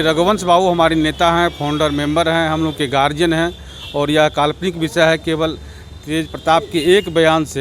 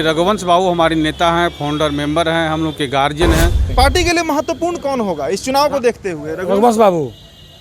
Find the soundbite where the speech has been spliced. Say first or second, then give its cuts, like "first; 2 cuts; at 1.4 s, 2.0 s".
second; 1 cut; at 3.7 s